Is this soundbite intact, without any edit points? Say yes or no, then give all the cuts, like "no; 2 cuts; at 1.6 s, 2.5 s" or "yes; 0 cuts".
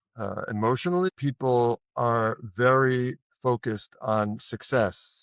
no; 1 cut; at 1.1 s